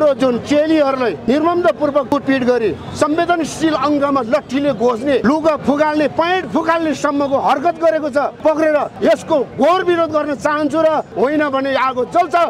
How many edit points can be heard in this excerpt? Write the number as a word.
six